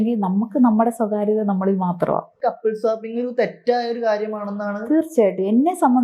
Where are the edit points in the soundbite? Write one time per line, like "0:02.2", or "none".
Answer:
0:02.3